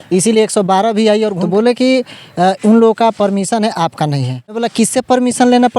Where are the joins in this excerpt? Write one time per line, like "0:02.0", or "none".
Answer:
0:01.4
0:04.6